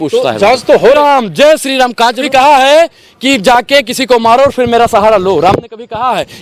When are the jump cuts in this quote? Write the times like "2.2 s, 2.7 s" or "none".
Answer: 0.9 s, 2.2 s